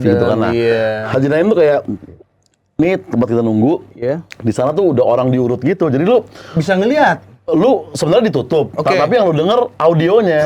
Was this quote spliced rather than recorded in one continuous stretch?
no; 0 cuts

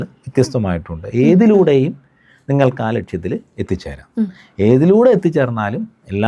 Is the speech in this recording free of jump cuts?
yes; 0 cuts

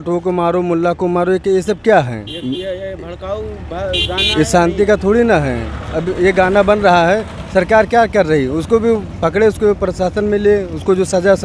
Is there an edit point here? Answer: no; 0 cuts

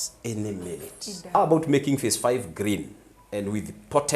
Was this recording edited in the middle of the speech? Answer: yes; 1 cut; at 1.3 s

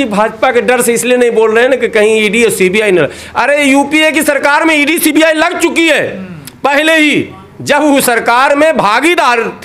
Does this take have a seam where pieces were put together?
no; 0 cuts

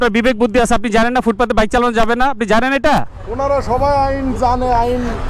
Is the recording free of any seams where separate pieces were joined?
yes; 0 cuts

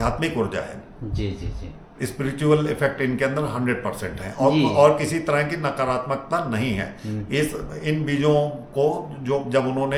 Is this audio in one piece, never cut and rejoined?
yes; 0 cuts

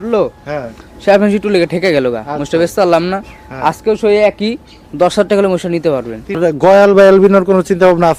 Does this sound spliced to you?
yes; 1 cut; at 6.4 s

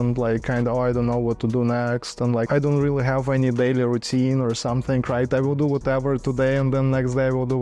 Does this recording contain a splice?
yes; 1 cut; at 2.5 s

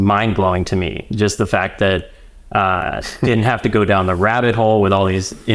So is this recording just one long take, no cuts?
yes; 0 cuts

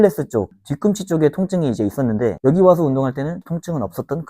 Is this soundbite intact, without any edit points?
no; 1 cut; at 2.4 s

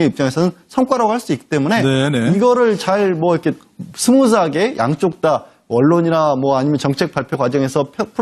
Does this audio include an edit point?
yes; 1 cut; at 5.0 s

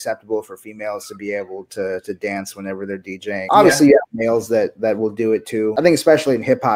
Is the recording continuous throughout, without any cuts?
no; 2 cuts; at 3.4 s, 5.7 s

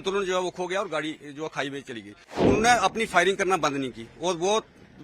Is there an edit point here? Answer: yes; 1 cut; at 2.3 s

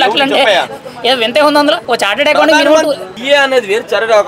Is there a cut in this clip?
yes; 2 cuts; at 1.8 s, 3.1 s

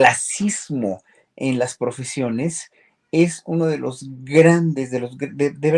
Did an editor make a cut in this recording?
no; 0 cuts

